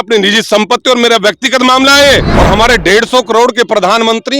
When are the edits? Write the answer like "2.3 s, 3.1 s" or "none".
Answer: 2.3 s